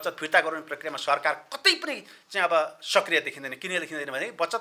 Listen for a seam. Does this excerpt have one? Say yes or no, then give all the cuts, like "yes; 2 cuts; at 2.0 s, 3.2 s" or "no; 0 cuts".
no; 0 cuts